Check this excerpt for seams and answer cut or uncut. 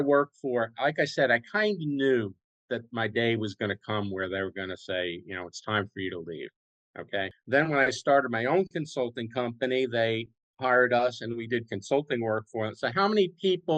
cut